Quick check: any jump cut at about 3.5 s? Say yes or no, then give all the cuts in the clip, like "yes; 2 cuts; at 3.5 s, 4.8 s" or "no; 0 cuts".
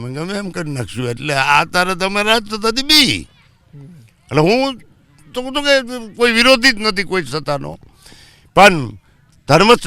no; 0 cuts